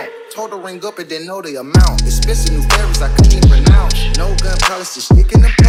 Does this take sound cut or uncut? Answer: uncut